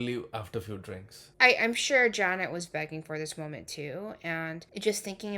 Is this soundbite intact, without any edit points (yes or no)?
yes